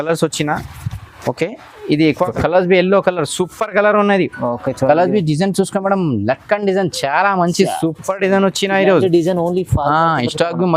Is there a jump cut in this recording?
yes; 1 cut; at 2.3 s

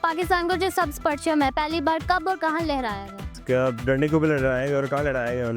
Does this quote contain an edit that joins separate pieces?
yes; 1 cut; at 3.4 s

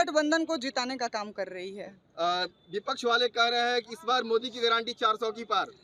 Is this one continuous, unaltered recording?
yes; 0 cuts

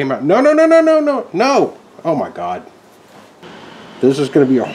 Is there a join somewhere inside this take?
yes; 1 cut; at 3.4 s

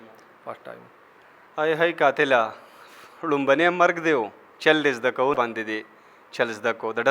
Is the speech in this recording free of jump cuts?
no; 1 cut; at 5.4 s

